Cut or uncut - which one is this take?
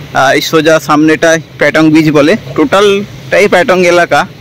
uncut